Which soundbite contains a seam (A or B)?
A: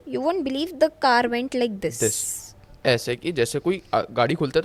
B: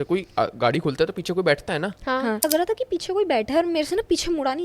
B